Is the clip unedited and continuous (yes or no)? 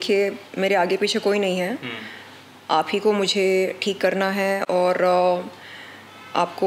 yes